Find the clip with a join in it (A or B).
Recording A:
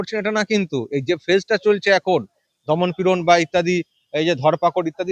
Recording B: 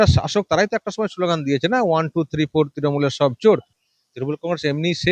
B